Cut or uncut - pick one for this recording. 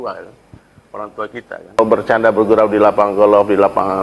cut